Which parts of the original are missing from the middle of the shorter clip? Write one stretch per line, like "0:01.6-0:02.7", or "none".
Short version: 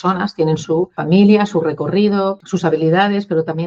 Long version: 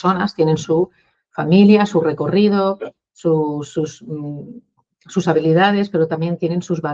0:01.0-0:01.4
0:02.8-0:05.0